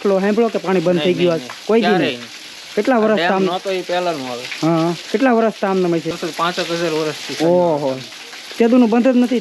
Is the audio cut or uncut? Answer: cut